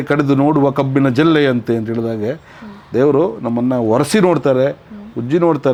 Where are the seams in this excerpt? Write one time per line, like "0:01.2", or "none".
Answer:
none